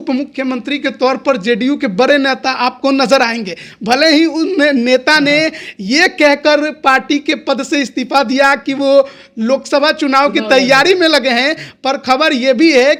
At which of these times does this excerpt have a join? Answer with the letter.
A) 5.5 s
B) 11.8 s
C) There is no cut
C